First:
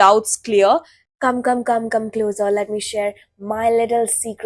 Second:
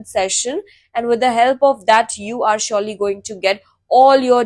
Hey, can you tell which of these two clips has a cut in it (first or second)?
first